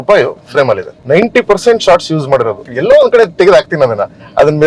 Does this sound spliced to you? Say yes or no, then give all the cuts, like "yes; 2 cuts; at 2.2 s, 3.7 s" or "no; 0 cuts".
yes; 2 cuts; at 0.9 s, 2.7 s